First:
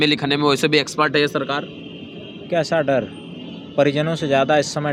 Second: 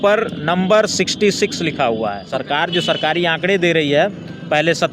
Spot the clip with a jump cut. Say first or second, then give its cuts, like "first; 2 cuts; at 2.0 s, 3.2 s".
second; 1 cut; at 2.2 s